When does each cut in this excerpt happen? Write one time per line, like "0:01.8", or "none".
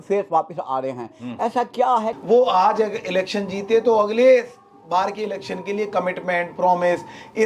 0:02.2